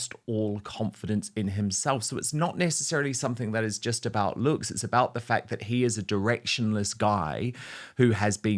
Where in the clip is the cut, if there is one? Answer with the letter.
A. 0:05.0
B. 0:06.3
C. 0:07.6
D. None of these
D